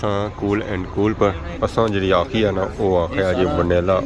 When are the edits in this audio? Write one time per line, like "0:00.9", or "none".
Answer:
0:01.5